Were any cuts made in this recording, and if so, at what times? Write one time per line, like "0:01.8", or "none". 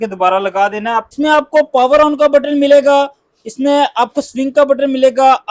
0:01.1